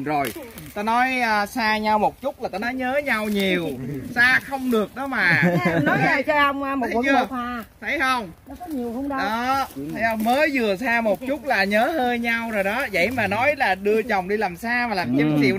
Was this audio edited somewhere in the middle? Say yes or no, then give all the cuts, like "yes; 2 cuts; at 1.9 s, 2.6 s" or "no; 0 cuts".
no; 0 cuts